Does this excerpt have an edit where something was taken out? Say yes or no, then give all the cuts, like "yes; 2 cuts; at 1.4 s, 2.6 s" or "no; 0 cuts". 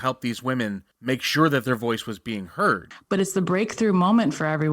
yes; 2 cuts; at 0.9 s, 2.9 s